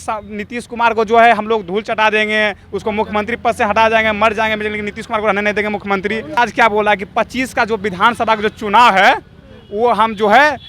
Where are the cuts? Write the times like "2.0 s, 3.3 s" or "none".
6.3 s